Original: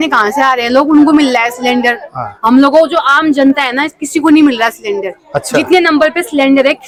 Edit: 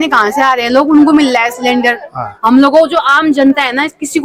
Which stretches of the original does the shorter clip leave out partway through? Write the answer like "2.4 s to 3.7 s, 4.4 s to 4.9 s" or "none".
none